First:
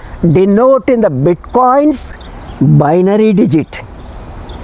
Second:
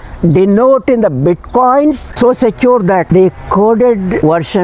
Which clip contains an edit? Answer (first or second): second